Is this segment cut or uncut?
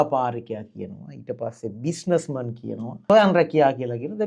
cut